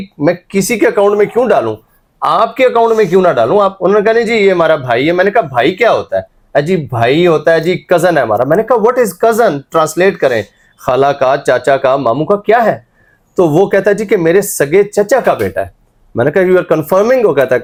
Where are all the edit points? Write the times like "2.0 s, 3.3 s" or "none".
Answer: none

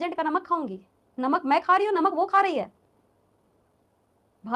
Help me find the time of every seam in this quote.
none

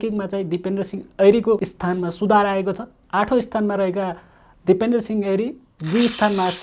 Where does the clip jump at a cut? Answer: 1.7 s

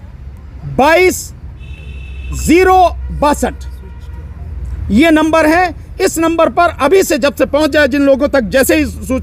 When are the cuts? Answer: none

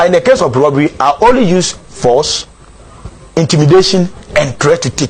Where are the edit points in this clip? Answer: none

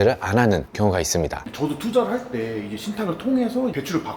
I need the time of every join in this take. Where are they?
1.4 s

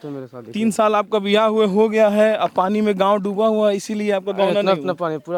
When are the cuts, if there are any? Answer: none

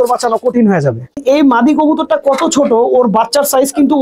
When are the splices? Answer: 1.2 s

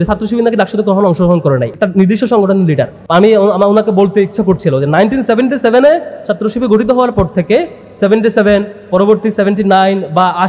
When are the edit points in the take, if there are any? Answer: 1.7 s, 3.0 s

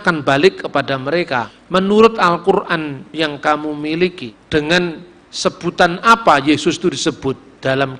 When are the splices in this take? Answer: 1.5 s, 4.3 s

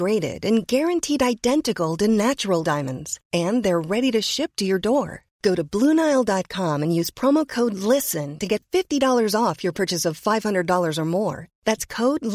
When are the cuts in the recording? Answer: none

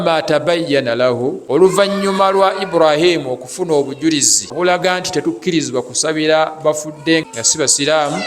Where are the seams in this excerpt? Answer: 1.6 s, 4.5 s, 7.2 s

